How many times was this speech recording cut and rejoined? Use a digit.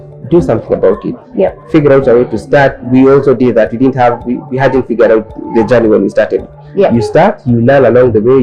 0